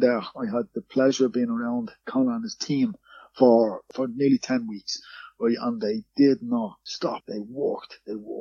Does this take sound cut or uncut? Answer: cut